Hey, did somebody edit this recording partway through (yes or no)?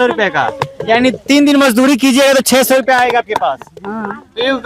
no